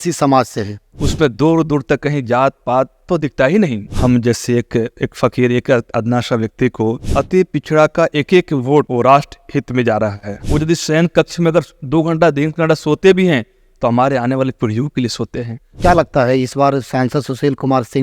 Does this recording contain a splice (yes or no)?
yes